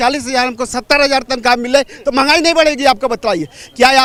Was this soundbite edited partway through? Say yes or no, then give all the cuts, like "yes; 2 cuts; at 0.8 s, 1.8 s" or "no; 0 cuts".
no; 0 cuts